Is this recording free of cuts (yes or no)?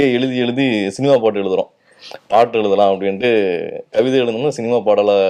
yes